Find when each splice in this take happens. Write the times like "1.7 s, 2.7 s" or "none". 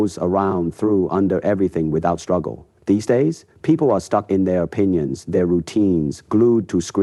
none